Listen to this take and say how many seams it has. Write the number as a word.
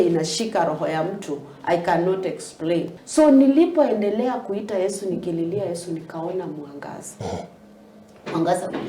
one